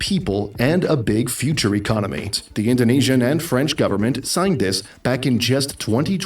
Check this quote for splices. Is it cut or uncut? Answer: cut